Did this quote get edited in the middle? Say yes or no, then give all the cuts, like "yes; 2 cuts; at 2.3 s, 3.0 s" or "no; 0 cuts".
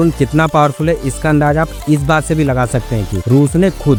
no; 0 cuts